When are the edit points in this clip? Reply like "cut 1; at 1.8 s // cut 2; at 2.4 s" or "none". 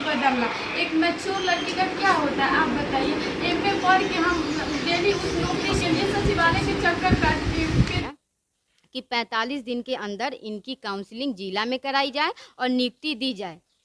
cut 1; at 8.0 s